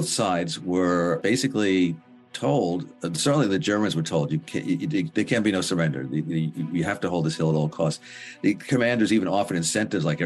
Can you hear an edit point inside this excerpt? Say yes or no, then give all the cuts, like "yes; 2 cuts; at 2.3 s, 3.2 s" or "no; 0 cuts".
yes; 1 cut; at 1.2 s